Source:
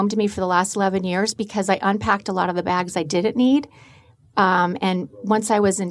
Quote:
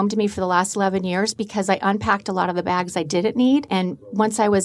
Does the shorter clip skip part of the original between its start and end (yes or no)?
yes